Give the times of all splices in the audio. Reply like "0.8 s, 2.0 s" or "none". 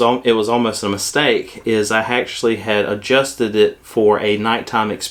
none